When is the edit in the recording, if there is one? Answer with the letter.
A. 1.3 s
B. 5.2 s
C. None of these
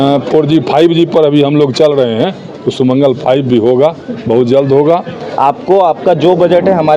B